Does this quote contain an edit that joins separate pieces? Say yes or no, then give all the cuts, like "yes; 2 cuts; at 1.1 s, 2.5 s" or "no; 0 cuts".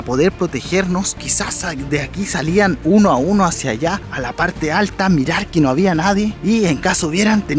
yes; 2 cuts; at 1.2 s, 4.0 s